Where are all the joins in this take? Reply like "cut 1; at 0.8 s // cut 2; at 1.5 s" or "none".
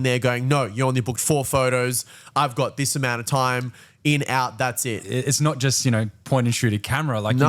cut 1; at 5.0 s